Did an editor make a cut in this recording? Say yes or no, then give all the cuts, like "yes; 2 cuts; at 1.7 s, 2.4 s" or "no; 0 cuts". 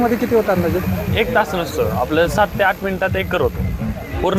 no; 0 cuts